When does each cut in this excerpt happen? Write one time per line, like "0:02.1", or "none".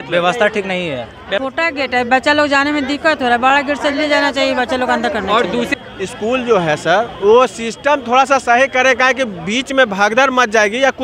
0:01.4
0:05.7